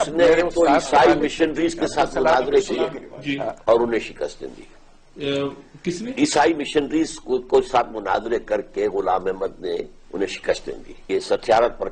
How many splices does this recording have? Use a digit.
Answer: 1